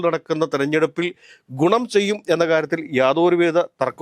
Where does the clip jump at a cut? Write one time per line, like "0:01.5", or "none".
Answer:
none